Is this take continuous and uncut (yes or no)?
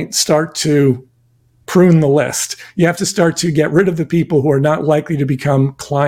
yes